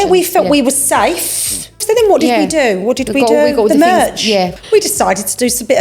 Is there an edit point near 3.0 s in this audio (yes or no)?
no